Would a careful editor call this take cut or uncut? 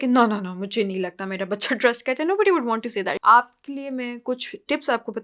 cut